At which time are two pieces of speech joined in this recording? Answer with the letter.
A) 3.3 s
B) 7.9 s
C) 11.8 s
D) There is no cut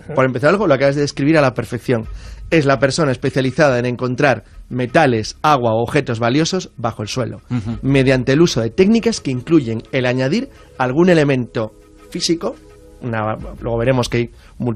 A